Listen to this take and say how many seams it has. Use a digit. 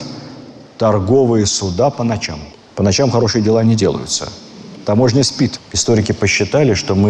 1